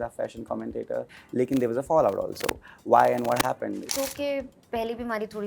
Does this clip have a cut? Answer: yes; 2 cuts; at 1.2 s, 3.9 s

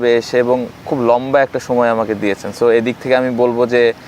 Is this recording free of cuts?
yes; 0 cuts

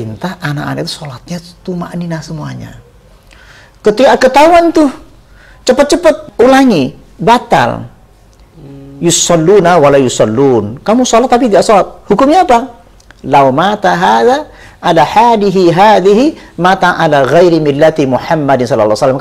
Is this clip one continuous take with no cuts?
no; 1 cut; at 6.2 s

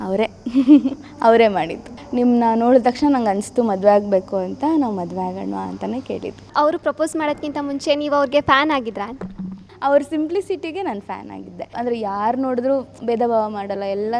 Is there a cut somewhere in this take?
yes; 4 cuts; at 1.9 s, 6.5 s, 9.7 s, 11.7 s

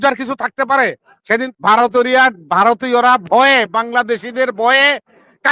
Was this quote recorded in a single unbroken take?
no; 1 cut; at 1.5 s

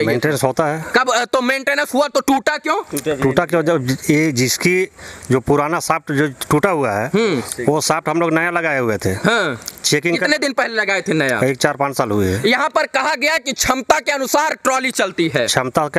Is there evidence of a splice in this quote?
no; 0 cuts

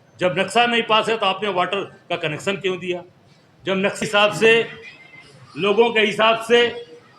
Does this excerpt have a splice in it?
yes; 1 cut; at 4.0 s

